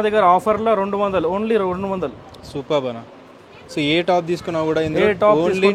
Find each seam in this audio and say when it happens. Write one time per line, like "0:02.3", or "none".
none